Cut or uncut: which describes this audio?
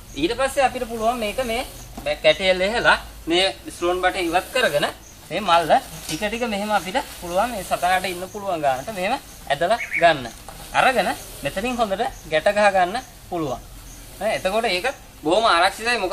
uncut